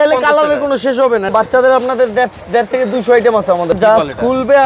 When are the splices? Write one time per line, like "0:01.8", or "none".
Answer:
0:01.3
0:03.8